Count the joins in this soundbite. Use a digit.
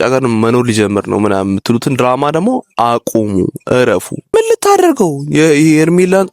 1